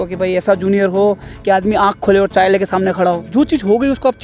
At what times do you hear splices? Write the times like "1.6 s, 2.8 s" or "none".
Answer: 3.3 s